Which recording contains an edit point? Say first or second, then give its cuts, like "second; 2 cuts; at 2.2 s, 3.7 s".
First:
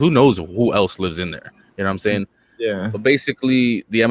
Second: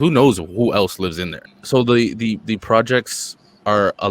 second; 1 cut; at 1.5 s